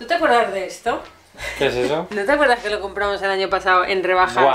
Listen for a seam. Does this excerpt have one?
no; 0 cuts

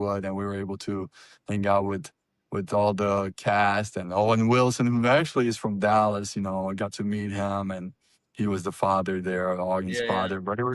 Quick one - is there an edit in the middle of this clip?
no; 0 cuts

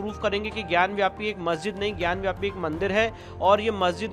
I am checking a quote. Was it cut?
no; 0 cuts

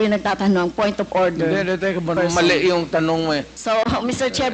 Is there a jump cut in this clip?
yes; 2 cuts; at 2.2 s, 3.5 s

